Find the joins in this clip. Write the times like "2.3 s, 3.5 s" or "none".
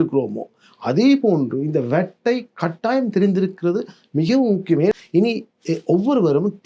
5.0 s